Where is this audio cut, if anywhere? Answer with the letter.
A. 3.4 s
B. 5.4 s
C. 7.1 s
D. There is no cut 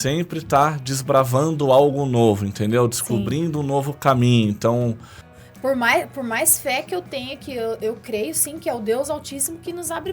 B